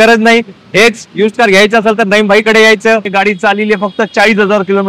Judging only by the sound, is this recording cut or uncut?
cut